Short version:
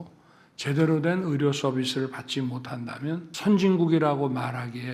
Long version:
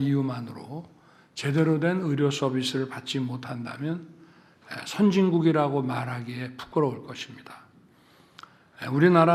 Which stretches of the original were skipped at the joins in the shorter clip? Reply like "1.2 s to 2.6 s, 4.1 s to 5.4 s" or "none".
4.1 s to 4.8 s